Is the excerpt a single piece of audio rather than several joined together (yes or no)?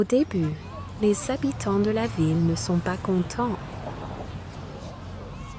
yes